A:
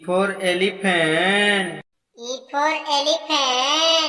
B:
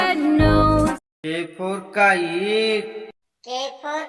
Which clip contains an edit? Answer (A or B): B